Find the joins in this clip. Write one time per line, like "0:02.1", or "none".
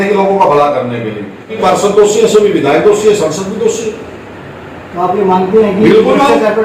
0:01.4